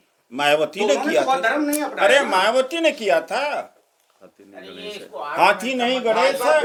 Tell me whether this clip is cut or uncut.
uncut